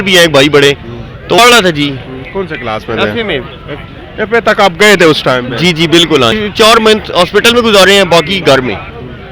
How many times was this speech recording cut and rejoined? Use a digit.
2